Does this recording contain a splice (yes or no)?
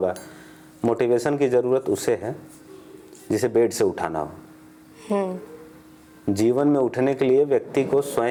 no